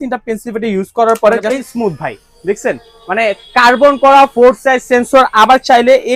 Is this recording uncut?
no; 1 cut; at 1.6 s

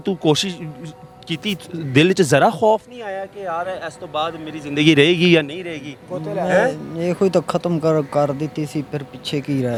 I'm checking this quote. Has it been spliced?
no; 0 cuts

